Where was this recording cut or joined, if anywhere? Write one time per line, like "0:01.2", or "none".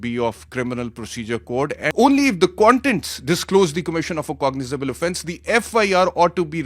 0:01.9